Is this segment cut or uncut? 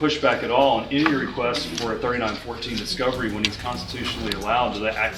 uncut